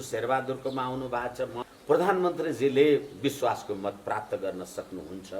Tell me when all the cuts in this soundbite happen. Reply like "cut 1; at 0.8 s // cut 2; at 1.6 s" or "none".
cut 1; at 1.6 s